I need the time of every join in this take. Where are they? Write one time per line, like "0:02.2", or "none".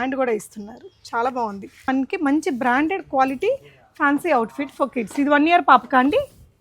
0:01.9